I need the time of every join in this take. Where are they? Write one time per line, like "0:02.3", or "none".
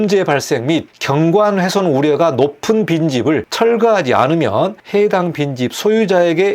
0:00.9
0:03.5
0:04.8